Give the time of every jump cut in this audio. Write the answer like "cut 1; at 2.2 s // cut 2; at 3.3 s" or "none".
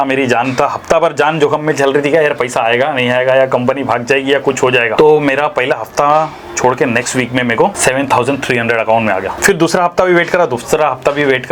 cut 1; at 4.9 s // cut 2; at 7.8 s // cut 3; at 9.3 s

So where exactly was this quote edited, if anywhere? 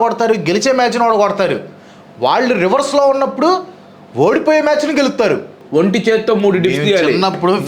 cut 1; at 5.6 s

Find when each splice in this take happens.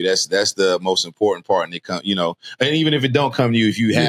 none

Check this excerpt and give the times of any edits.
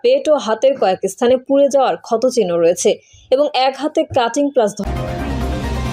cut 1; at 4.8 s

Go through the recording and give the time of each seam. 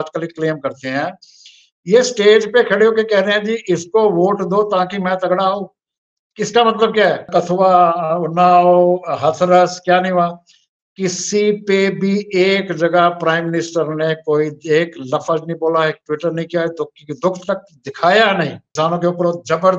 cut 1; at 7.3 s // cut 2; at 18.6 s

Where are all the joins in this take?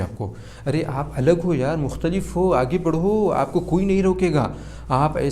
none

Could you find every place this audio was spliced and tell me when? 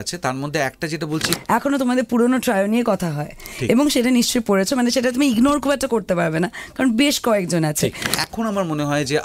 cut 1; at 1.3 s // cut 2; at 8.1 s

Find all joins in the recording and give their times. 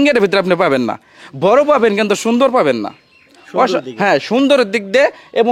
none

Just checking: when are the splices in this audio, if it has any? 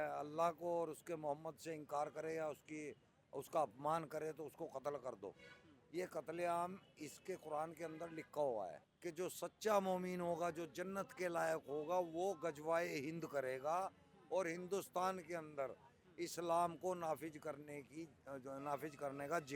cut 1; at 8.9 s

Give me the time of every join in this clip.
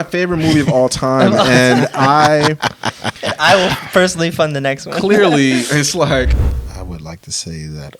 cut 1; at 6.4 s

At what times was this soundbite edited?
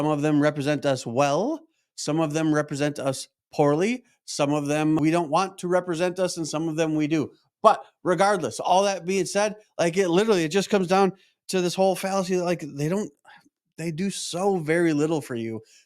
cut 1; at 5.0 s

